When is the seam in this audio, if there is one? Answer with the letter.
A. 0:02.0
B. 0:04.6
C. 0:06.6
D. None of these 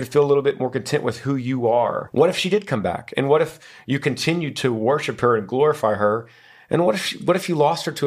A